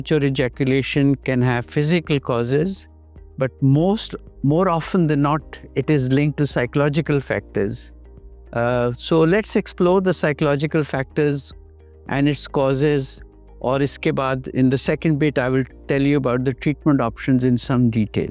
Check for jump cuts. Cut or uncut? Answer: uncut